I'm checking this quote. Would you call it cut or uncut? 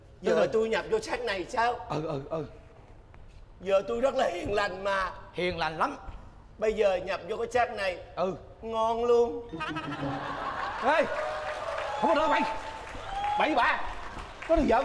uncut